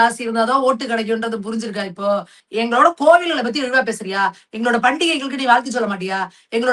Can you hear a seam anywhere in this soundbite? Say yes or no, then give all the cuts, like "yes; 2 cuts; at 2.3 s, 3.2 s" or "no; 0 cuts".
yes; 1 cut; at 2.4 s